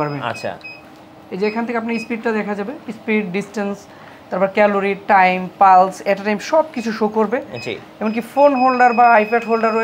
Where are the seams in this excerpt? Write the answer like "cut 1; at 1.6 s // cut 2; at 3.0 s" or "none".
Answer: none